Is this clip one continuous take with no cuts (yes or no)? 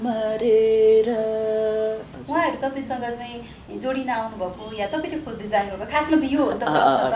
no